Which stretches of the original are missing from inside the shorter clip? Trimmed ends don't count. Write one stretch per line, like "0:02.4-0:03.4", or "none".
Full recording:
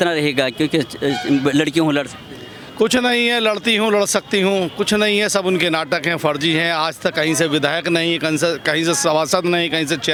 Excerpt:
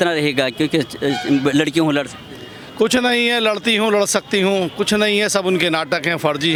none